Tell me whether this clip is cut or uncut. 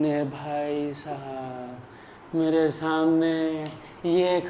uncut